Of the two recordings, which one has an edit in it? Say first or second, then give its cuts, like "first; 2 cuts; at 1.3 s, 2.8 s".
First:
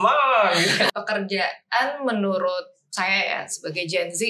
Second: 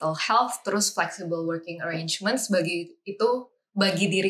first; 1 cut; at 0.9 s